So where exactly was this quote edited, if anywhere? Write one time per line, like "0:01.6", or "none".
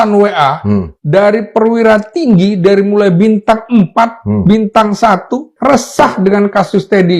0:05.5